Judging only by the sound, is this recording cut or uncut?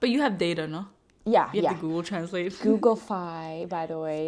uncut